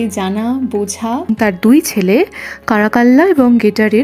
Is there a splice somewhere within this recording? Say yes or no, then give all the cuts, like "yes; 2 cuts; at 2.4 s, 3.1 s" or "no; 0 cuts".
yes; 1 cut; at 1.3 s